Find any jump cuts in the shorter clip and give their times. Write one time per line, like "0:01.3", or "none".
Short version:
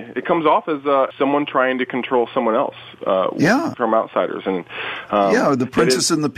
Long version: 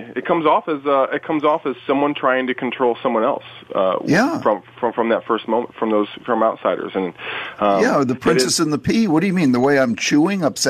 0:01.1
0:03.7